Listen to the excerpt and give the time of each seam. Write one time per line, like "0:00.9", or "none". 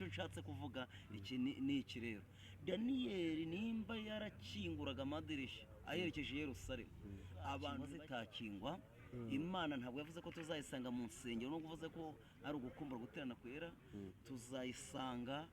0:07.9